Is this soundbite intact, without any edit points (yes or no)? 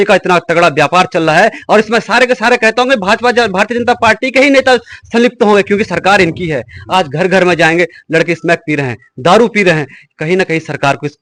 yes